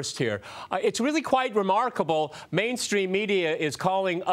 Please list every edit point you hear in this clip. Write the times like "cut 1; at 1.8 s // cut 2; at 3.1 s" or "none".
cut 1; at 2.1 s